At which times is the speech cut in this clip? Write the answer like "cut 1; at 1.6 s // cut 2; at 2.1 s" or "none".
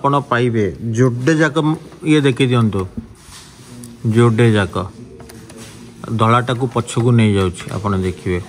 none

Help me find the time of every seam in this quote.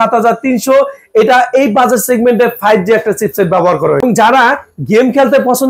cut 1; at 4.0 s

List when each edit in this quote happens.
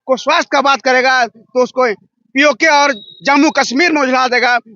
none

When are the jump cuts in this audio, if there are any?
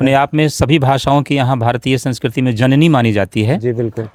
none

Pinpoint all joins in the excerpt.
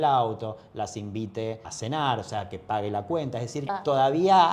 cut 1; at 1.7 s // cut 2; at 3.7 s

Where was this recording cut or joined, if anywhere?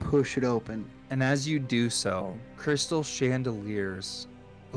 cut 1; at 0.9 s // cut 2; at 2.4 s

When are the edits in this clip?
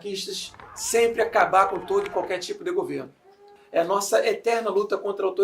cut 1; at 3.5 s

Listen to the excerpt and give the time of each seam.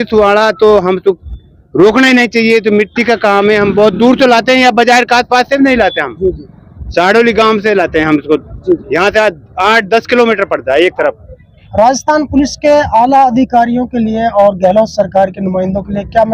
none

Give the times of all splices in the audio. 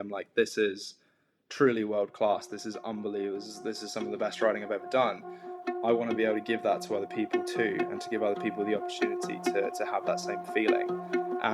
none

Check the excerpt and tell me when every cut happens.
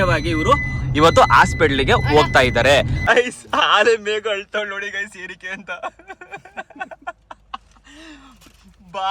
cut 1; at 3.0 s

